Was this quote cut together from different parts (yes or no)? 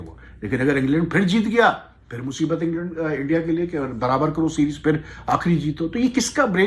no